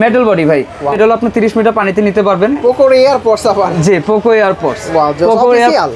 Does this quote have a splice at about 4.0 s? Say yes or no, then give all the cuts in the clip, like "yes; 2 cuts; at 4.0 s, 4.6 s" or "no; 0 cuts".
no; 2 cuts; at 0.9 s, 2.6 s